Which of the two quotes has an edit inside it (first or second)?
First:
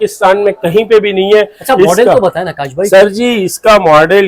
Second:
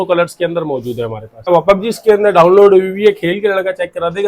second